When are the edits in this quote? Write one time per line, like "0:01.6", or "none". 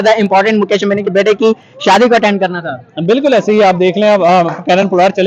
none